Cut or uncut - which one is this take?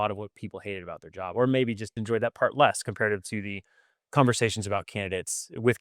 cut